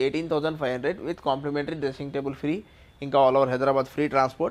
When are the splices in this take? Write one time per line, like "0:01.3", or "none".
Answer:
none

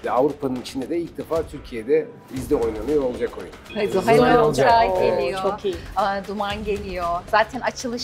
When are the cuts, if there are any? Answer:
0:02.3
0:03.7

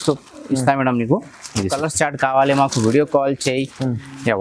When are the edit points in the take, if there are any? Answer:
0:01.7

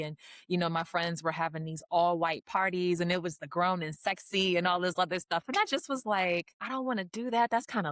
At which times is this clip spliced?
0:06.5

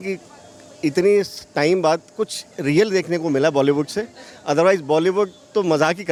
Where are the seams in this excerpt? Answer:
none

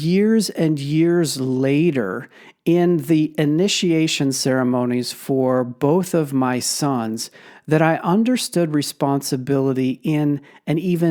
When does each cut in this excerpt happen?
none

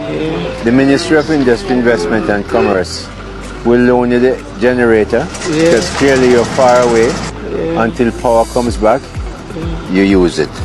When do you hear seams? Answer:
none

